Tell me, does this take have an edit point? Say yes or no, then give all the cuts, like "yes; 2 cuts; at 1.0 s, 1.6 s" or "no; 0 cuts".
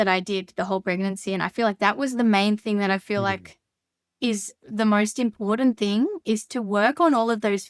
no; 0 cuts